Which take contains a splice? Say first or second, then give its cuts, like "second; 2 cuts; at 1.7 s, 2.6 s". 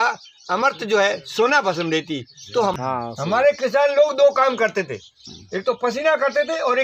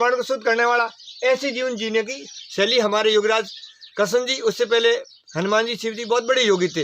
first; 1 cut; at 2.7 s